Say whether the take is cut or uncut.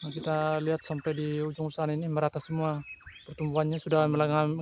uncut